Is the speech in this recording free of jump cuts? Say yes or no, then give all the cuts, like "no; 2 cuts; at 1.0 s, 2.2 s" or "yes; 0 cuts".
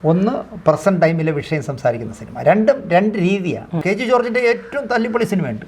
no; 1 cut; at 3.8 s